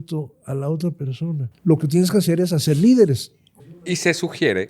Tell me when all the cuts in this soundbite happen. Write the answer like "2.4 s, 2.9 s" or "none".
1.5 s, 3.8 s